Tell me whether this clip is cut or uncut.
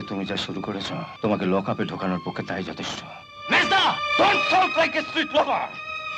cut